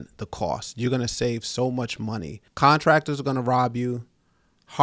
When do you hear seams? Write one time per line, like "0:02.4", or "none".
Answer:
0:02.4